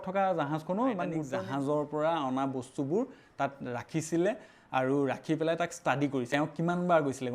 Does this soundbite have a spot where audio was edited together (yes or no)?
yes